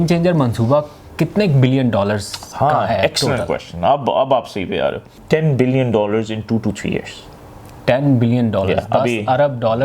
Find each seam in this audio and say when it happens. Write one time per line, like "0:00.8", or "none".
0:05.2